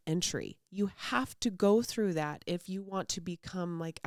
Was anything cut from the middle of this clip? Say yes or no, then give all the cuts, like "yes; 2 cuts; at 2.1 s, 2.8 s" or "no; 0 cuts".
no; 0 cuts